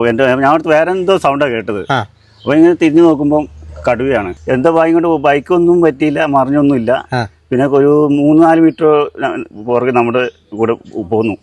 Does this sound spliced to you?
yes; 1 cut; at 4.3 s

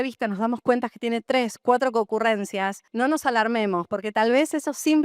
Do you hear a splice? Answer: yes; 1 cut; at 2.8 s

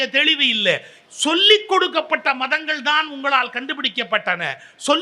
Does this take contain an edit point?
yes; 1 cut; at 0.9 s

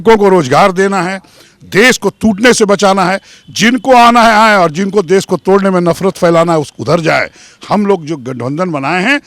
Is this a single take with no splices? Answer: yes; 0 cuts

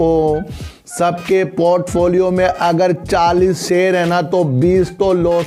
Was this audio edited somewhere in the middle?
no; 0 cuts

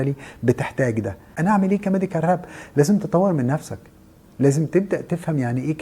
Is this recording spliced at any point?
yes; 1 cut; at 1.3 s

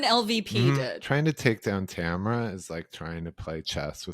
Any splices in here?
yes; 1 cut; at 0.9 s

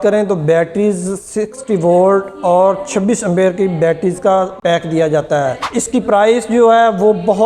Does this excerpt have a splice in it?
yes; 1 cut; at 5.7 s

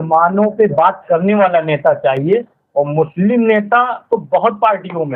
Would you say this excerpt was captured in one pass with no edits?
yes; 0 cuts

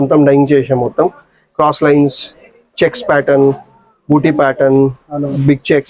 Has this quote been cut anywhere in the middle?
no; 0 cuts

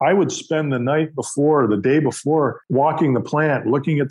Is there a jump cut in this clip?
yes; 1 cut; at 2.7 s

